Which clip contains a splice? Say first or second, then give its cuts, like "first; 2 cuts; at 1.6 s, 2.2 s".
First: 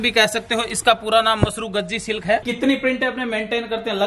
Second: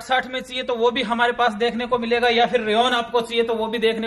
first; 1 cut; at 2.4 s